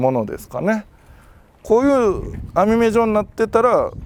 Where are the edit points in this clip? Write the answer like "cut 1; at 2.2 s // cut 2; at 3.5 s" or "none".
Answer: none